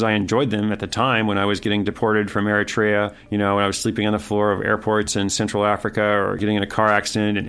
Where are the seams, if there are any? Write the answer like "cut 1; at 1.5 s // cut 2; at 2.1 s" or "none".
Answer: cut 1; at 3.2 s // cut 2; at 6.4 s